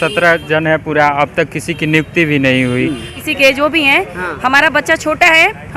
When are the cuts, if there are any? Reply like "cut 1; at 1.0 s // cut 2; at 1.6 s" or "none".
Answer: cut 1; at 3.2 s

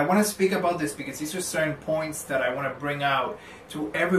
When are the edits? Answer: none

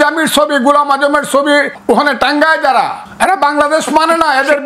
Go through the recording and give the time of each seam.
cut 1; at 1.7 s // cut 2; at 3.0 s

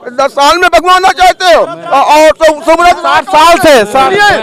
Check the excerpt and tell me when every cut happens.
none

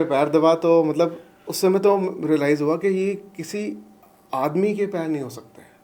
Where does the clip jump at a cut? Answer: none

